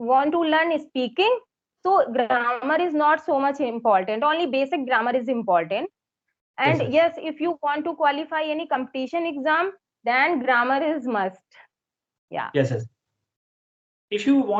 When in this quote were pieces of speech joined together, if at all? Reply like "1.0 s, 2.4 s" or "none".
none

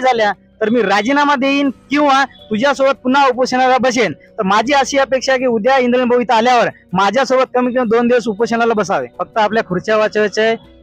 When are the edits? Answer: 9.2 s

